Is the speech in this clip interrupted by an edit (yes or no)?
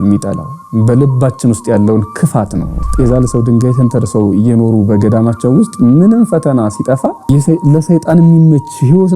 yes